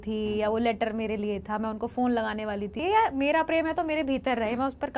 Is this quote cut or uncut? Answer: cut